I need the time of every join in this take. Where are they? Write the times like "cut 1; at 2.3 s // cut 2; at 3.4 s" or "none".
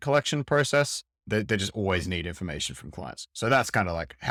none